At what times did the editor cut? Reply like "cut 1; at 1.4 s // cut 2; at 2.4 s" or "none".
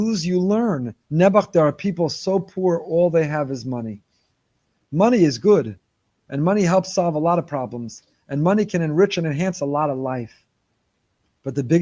cut 1; at 1.0 s